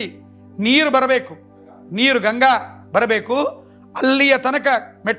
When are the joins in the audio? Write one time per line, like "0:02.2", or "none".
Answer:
none